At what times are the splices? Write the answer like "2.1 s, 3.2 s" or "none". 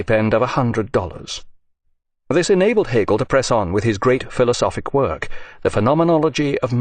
none